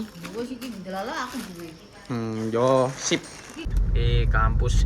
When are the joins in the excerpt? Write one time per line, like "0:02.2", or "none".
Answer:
0:03.7